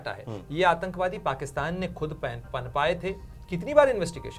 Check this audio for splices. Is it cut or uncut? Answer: cut